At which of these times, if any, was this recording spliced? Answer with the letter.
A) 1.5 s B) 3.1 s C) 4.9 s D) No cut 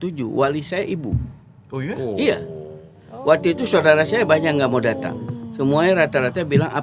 D